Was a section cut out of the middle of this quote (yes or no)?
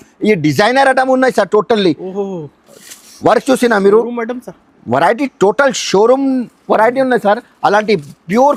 no